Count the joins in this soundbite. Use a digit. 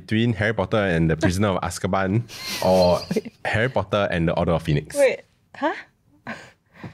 0